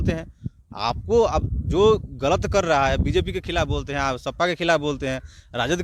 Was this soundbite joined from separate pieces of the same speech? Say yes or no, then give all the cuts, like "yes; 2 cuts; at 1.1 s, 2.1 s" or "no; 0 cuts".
no; 0 cuts